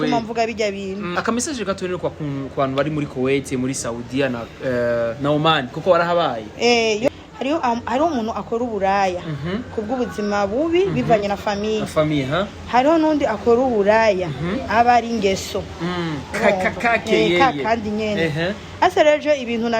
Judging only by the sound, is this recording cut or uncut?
cut